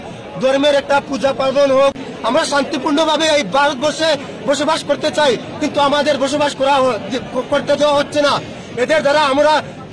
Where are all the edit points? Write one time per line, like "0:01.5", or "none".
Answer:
0:02.0